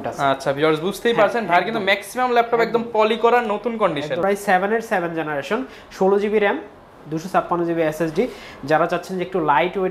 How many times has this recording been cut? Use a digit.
1